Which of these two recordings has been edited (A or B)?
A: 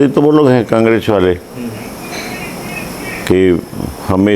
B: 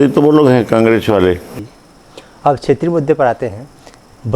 B